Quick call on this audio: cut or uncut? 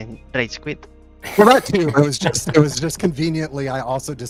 uncut